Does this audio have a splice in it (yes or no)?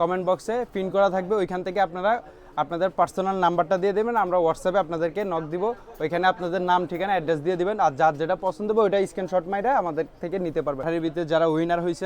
yes